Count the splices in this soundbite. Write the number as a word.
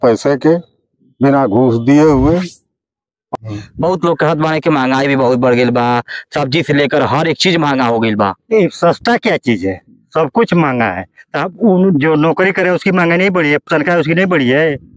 one